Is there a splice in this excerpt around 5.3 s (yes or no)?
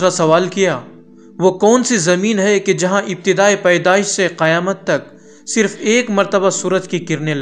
no